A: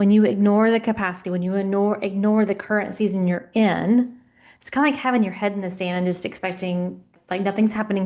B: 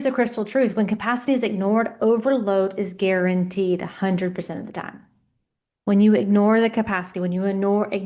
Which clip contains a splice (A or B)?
A